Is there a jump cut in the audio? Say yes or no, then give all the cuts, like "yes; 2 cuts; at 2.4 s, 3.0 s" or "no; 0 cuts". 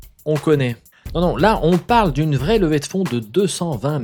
no; 0 cuts